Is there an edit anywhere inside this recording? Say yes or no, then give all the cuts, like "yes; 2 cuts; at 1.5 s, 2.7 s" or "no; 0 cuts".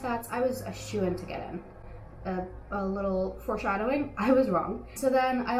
no; 0 cuts